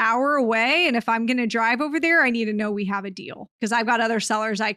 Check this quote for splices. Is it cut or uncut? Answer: cut